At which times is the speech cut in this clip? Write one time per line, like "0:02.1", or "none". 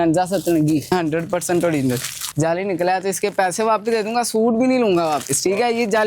0:00.9
0:02.2